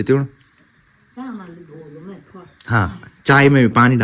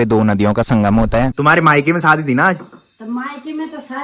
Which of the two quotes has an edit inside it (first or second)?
second